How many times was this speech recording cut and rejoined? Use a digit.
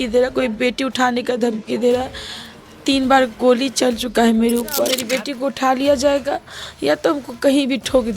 1